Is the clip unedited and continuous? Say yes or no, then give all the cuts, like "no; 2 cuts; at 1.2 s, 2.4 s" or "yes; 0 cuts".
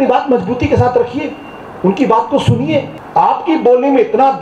no; 1 cut; at 3.0 s